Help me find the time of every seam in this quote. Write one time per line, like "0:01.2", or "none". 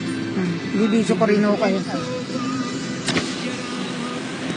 0:03.5